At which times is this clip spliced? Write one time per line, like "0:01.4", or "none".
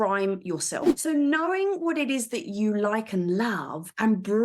0:00.9